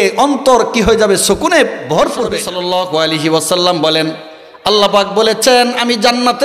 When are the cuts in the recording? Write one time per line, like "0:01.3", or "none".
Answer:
0:02.5